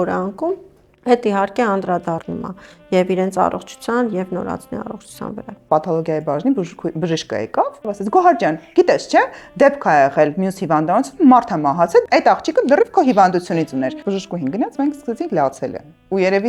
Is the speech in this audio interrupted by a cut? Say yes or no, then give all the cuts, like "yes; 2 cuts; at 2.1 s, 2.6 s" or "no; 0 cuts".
yes; 4 cuts; at 5.6 s, 7.8 s, 12.0 s, 14.0 s